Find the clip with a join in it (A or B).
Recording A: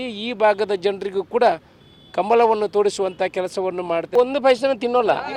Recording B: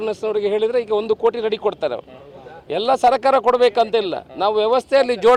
A